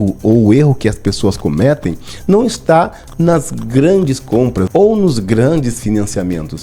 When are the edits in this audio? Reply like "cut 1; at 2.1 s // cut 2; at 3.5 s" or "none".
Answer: none

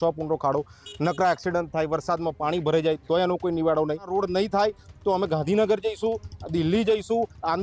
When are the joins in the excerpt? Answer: cut 1; at 4.1 s

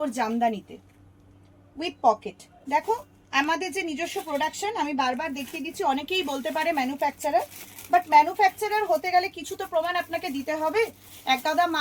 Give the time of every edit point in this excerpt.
none

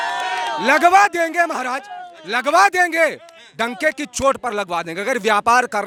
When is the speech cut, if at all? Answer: none

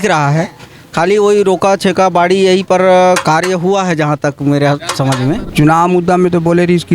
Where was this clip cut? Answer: cut 1; at 5.5 s

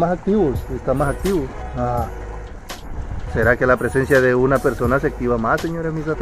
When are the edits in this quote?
cut 1; at 1.6 s

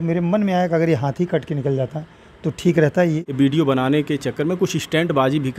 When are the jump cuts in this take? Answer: cut 1; at 3.2 s

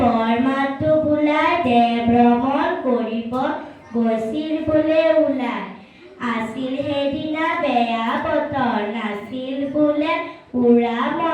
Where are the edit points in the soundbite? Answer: cut 1; at 8.9 s

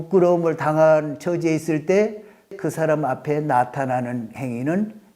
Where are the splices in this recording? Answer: cut 1; at 2.6 s

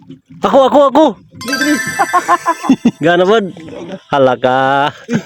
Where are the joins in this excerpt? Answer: cut 1; at 2.9 s

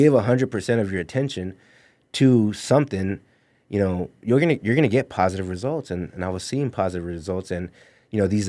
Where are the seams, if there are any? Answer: none

